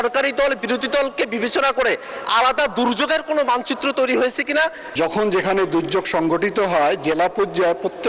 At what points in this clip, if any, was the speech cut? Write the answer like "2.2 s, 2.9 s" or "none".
4.8 s